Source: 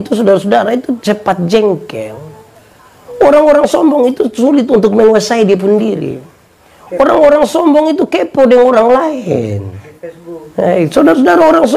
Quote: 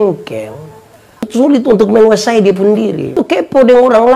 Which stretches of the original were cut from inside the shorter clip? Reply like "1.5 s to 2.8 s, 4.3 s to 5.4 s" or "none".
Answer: 2.9 s to 4.3 s, 6.2 s to 8.0 s

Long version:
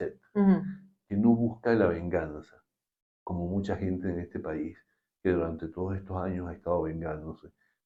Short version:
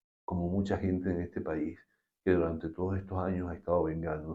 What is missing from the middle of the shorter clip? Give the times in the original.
none

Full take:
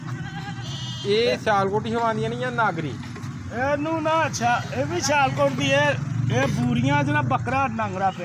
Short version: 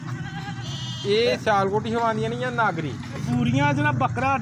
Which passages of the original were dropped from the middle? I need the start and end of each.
3.2 s to 6.5 s

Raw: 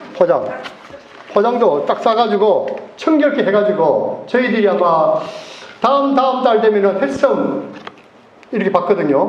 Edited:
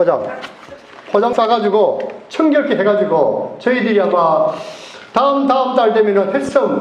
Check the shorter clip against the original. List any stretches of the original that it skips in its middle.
1.5 s to 2.0 s

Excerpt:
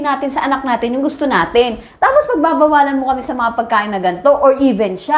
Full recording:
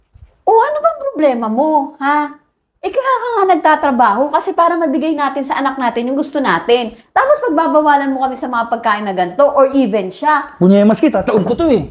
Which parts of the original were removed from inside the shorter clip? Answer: none

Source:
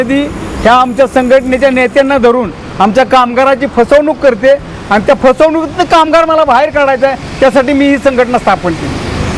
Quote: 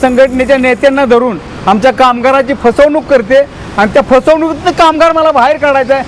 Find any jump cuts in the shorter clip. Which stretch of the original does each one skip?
none

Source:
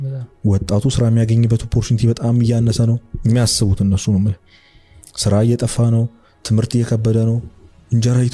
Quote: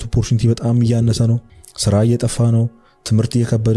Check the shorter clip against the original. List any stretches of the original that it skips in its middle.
3.1 s to 4.9 s

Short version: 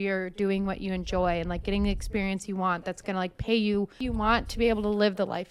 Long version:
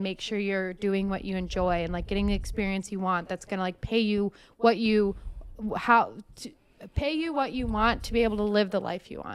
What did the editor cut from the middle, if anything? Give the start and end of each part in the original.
4.4 s to 7.5 s

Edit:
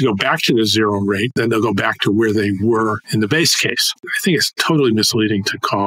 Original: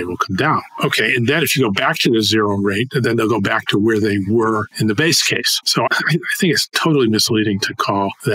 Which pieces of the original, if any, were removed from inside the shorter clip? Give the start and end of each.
2.9 s to 3.0 s, 5.7 s to 6.2 s

